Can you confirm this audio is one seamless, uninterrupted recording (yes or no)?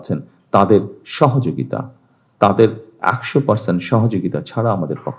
yes